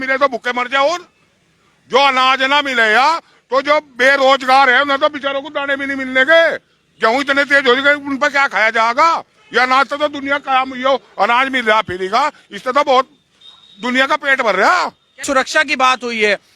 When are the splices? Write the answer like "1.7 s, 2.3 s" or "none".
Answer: 15.2 s